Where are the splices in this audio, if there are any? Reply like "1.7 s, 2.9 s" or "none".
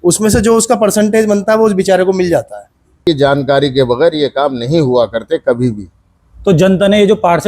3.0 s

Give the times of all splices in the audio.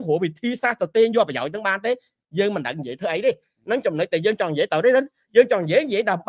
none

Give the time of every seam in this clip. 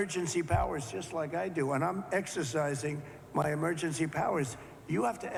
none

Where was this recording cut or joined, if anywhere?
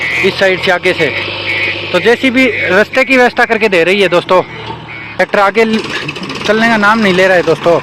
5.2 s

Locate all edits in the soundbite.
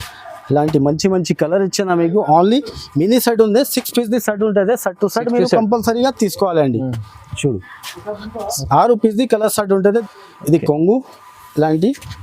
10.0 s

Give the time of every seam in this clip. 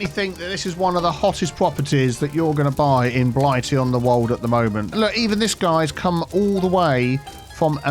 4.9 s

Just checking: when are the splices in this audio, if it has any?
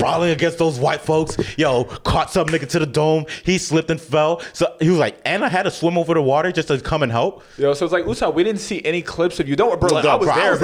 none

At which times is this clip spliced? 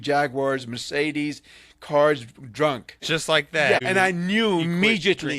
2.9 s, 3.8 s

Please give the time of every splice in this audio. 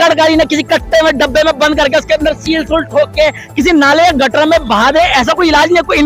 none

